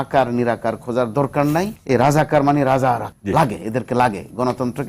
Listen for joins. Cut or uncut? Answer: cut